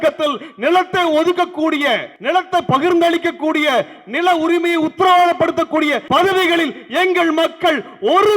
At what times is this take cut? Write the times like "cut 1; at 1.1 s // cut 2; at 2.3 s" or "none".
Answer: cut 1; at 2.1 s // cut 2; at 6.0 s